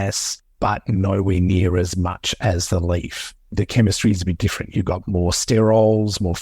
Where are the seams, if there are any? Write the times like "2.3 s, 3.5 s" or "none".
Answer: 3.5 s